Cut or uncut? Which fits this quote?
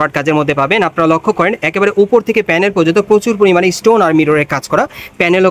uncut